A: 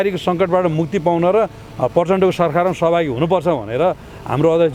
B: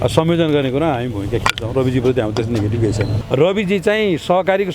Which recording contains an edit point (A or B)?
B